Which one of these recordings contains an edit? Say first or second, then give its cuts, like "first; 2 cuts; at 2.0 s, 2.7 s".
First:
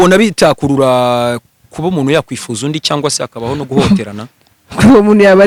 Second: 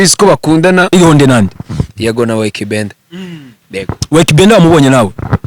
second; 1 cut; at 0.9 s